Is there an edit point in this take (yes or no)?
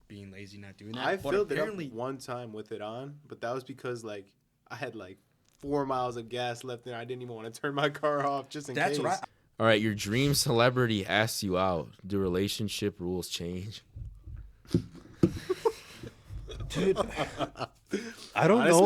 yes